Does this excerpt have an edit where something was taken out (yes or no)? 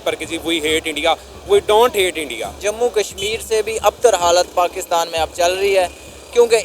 yes